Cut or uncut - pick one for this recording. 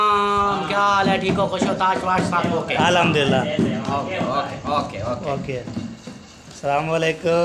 uncut